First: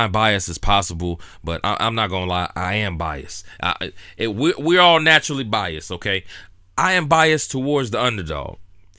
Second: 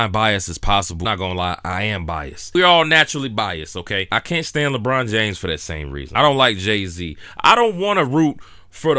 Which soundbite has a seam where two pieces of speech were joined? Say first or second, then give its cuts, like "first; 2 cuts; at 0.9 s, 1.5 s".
second; 3 cuts; at 1.0 s, 2.5 s, 4.1 s